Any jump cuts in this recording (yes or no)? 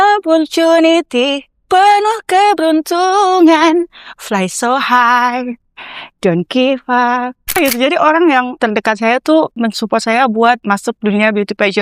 yes